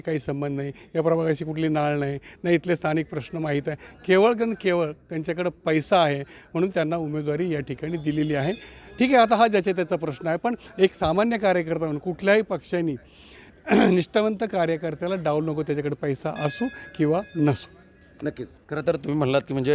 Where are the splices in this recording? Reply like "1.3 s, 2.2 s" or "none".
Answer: none